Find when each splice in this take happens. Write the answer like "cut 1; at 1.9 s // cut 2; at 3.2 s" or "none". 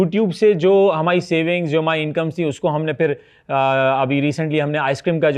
none